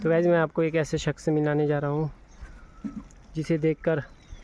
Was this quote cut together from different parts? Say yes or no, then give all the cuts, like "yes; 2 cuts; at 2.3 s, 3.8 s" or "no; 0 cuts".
no; 0 cuts